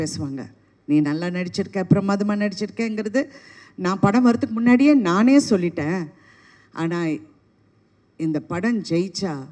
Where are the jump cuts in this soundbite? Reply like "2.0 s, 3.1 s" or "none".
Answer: none